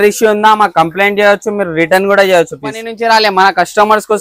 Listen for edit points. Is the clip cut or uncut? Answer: cut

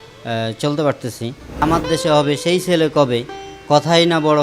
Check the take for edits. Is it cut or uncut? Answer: cut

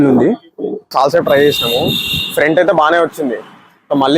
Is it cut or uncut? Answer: cut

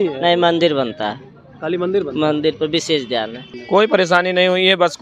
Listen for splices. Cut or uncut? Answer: cut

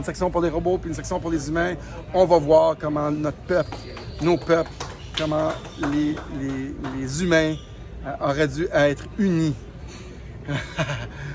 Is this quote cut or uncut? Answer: uncut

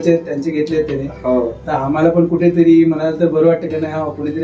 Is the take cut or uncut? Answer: uncut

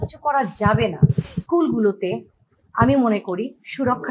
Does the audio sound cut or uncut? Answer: cut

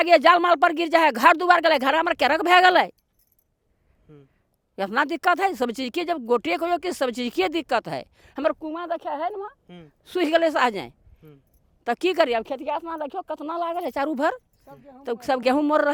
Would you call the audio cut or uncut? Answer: uncut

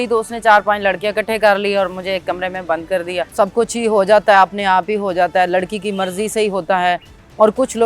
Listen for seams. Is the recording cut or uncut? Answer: cut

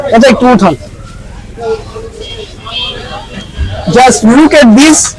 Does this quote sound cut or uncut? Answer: uncut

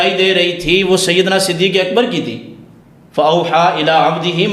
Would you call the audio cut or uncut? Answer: uncut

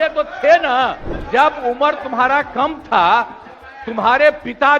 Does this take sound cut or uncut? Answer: cut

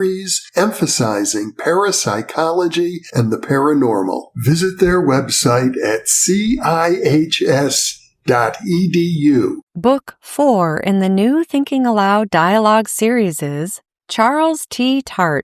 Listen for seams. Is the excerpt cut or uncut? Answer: cut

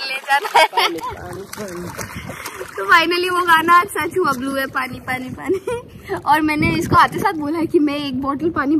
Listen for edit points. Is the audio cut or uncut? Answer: uncut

